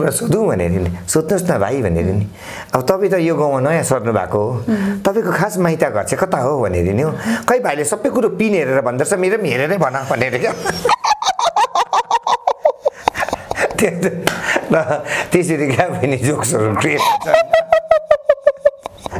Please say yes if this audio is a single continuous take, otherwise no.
yes